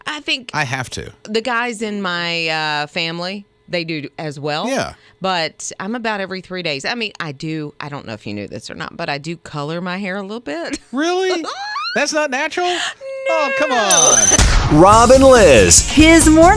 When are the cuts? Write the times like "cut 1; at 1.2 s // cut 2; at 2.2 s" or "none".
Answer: cut 1; at 14.5 s